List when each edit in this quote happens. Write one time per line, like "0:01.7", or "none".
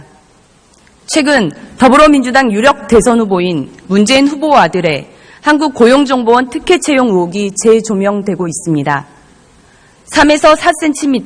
0:04.4